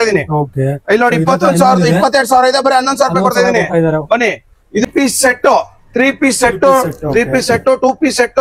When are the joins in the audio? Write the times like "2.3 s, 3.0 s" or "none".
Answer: 4.9 s